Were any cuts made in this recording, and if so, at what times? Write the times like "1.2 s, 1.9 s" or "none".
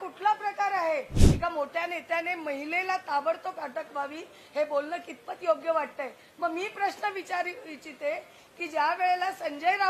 1.2 s